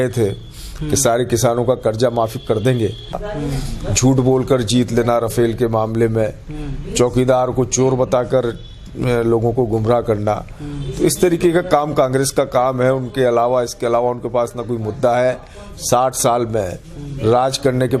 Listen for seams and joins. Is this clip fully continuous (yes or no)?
no